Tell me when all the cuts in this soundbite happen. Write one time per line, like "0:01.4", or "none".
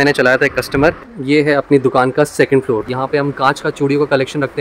0:01.1
0:02.9